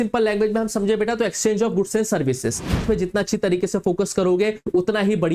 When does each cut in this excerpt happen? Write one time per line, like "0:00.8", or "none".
0:02.8